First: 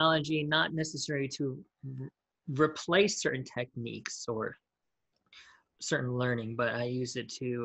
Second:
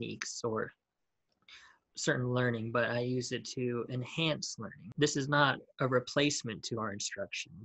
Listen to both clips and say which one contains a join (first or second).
second